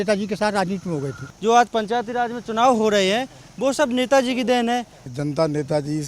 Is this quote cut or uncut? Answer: cut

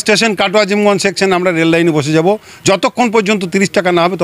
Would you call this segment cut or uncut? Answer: uncut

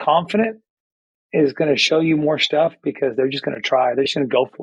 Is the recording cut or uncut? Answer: uncut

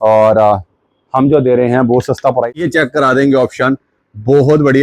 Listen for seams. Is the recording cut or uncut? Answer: cut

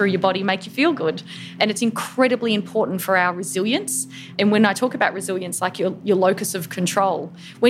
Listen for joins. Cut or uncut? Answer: cut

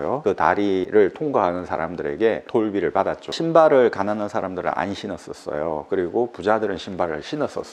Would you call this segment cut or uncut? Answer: cut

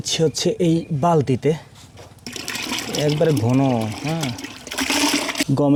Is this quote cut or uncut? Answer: uncut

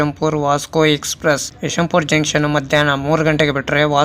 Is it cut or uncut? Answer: cut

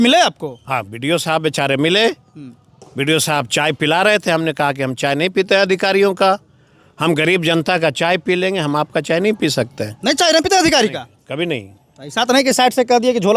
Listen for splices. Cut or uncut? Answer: uncut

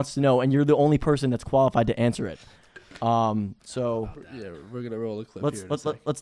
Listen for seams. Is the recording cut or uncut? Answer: uncut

